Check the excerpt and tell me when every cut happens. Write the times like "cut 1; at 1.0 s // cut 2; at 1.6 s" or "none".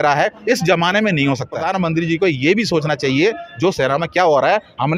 cut 1; at 1.6 s